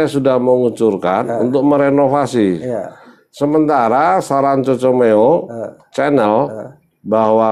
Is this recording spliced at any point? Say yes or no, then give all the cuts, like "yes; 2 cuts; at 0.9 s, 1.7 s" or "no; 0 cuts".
no; 0 cuts